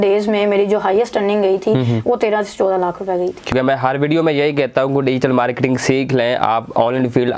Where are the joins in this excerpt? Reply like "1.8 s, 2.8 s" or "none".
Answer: 3.5 s